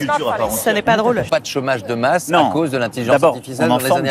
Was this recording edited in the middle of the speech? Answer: yes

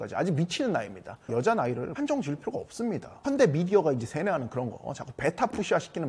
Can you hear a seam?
yes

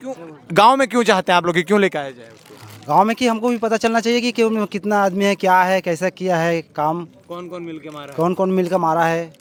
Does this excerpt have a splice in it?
no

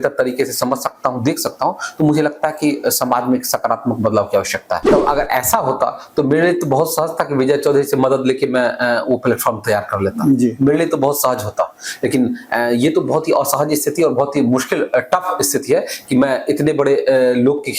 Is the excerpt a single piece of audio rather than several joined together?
no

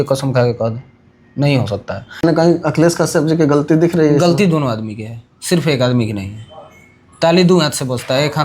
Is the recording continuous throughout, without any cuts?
no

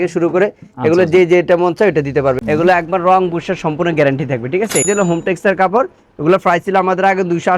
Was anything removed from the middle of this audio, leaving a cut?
yes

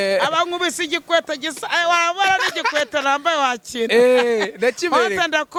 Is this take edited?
no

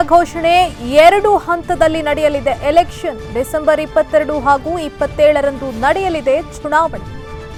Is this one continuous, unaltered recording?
yes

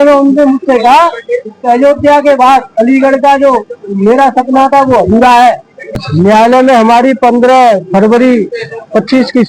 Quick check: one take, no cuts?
no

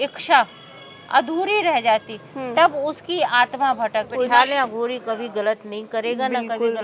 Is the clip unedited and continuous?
no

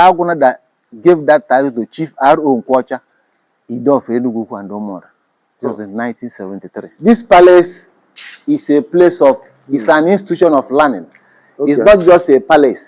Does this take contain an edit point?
yes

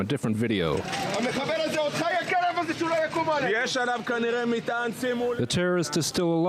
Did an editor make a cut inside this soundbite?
yes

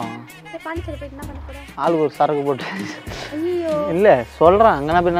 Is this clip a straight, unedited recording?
yes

